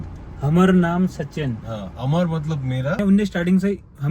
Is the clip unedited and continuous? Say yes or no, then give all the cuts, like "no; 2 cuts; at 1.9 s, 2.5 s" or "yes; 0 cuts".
no; 1 cut; at 3.0 s